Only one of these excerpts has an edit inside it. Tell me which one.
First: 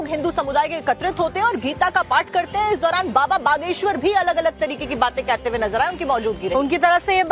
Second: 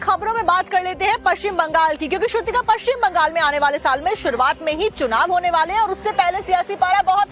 second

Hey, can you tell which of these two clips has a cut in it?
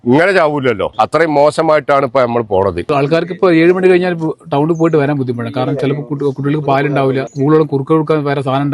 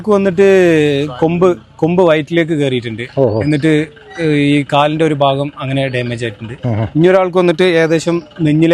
first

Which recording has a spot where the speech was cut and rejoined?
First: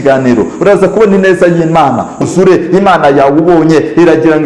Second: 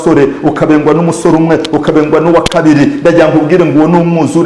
first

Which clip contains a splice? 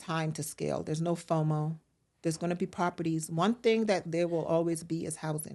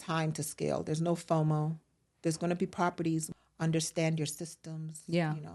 second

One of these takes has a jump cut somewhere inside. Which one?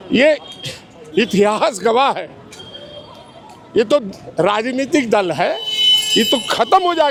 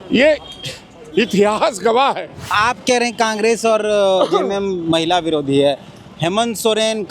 second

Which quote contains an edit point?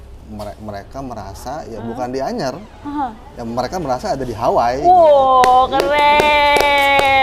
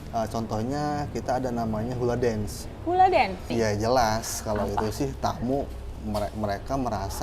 second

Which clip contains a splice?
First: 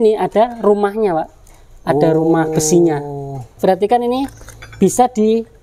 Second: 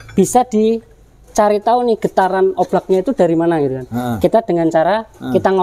first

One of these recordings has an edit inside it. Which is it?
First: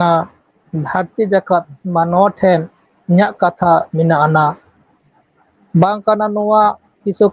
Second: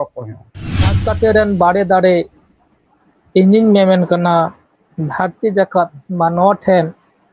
second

